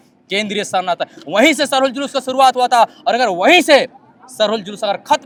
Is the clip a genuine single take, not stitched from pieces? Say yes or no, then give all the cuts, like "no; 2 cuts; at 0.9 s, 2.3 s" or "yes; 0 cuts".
yes; 0 cuts